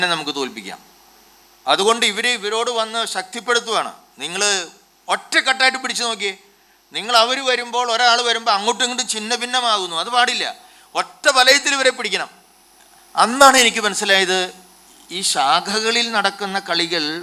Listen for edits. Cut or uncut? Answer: uncut